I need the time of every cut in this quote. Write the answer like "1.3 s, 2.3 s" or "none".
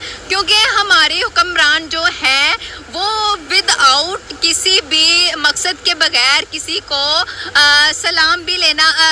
none

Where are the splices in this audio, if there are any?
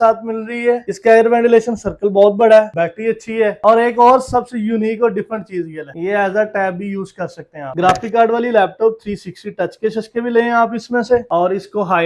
none

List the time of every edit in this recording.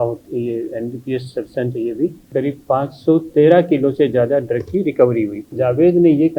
2.3 s, 5.6 s

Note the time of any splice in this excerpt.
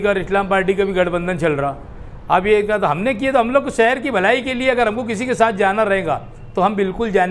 none

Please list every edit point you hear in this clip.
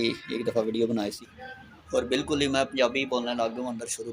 1.3 s

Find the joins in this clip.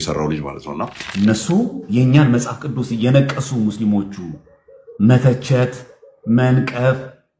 1.0 s

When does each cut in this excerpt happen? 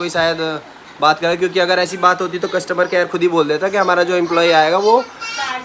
none

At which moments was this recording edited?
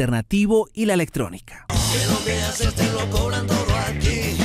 1.1 s

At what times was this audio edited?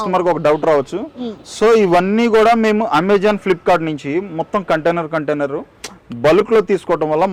none

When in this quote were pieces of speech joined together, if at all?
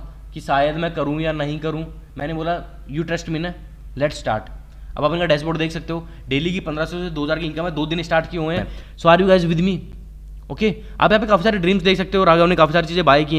8.7 s

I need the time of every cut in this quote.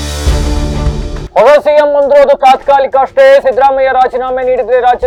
none

